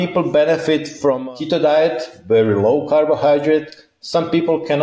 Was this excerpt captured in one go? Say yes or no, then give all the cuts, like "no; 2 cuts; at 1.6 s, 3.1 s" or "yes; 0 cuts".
no; 1 cut; at 0.9 s